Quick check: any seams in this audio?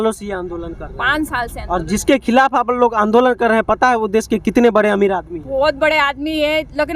no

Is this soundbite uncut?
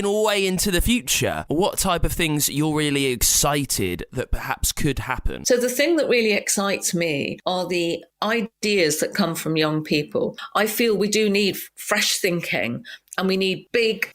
no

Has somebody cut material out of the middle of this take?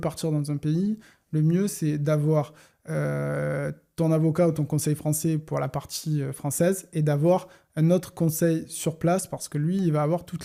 no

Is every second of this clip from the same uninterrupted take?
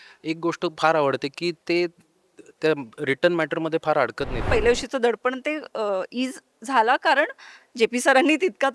no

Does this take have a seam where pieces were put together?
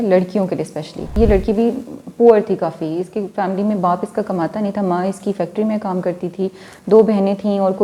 yes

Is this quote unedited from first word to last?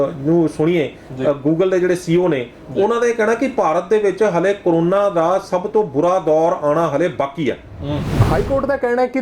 no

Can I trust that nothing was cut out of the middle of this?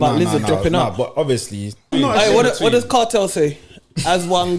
no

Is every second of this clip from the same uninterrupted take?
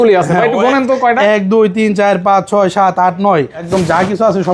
no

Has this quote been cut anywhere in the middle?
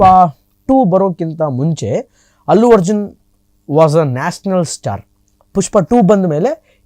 no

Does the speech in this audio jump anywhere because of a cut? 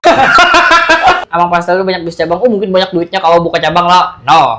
yes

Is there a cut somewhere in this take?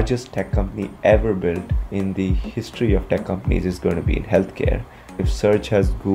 yes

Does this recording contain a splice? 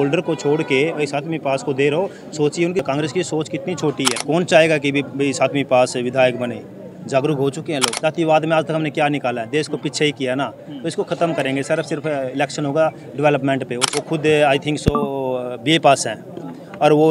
yes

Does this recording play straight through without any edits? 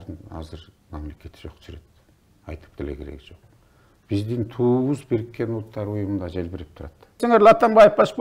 no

